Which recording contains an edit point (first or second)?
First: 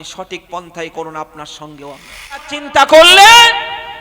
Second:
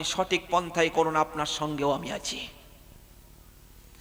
first